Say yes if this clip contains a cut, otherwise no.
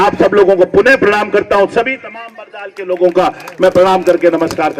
no